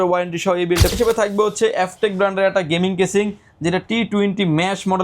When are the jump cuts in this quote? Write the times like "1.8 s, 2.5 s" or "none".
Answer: 0.9 s